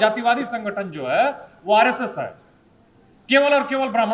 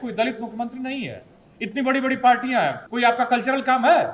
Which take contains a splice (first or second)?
second